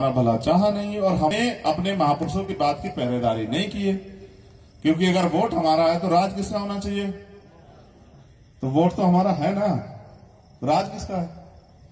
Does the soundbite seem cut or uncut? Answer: cut